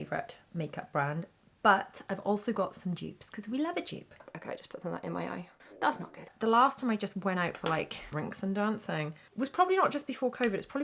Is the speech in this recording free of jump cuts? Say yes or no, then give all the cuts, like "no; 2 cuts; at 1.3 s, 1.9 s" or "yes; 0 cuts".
no; 4 cuts; at 4.2 s, 6.3 s, 8.0 s, 9.3 s